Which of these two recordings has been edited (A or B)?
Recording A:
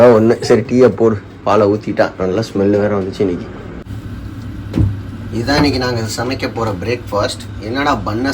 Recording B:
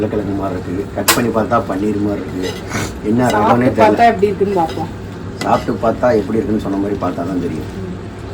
A